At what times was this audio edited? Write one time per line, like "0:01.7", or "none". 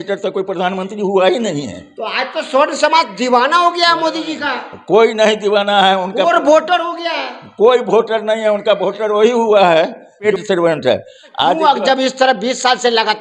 0:10.3
0:11.6